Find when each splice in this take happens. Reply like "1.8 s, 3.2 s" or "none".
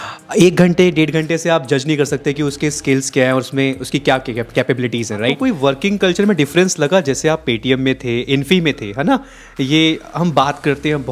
5.4 s